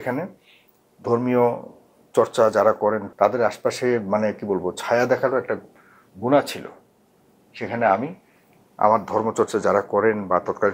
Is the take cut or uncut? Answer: cut